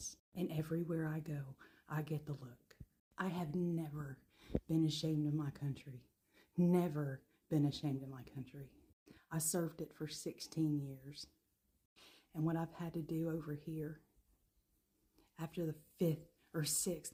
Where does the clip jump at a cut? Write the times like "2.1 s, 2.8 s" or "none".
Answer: none